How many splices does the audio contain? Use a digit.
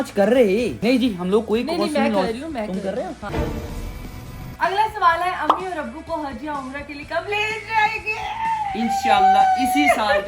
1